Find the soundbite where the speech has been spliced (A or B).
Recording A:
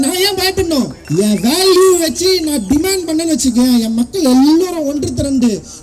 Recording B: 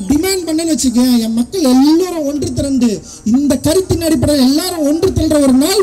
A